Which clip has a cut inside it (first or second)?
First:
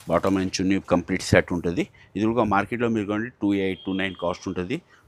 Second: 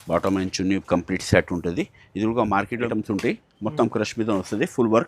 second